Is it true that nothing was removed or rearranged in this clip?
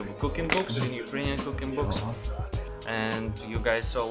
yes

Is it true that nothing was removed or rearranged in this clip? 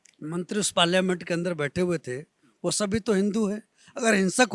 yes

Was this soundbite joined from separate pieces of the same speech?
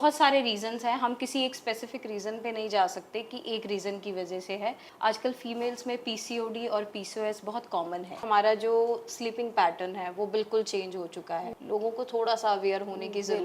yes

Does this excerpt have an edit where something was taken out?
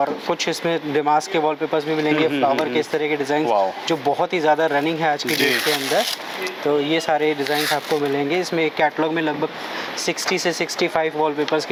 no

